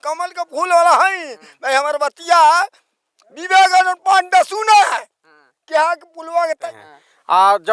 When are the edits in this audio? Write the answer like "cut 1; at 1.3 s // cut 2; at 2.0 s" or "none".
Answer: cut 1; at 6.6 s

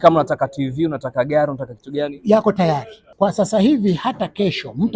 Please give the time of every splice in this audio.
cut 1; at 3.0 s

